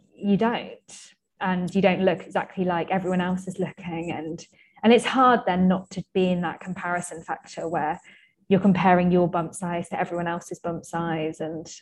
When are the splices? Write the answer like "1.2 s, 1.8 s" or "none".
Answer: none